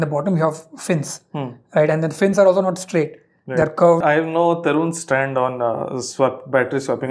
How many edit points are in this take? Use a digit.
1